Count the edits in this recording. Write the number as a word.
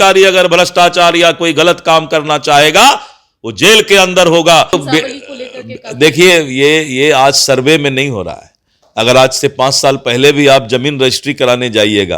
one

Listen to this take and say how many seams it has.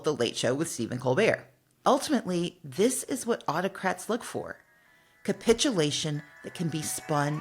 one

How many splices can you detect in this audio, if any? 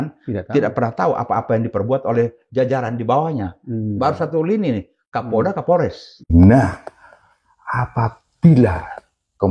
one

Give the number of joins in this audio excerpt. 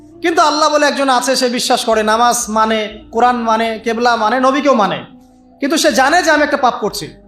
zero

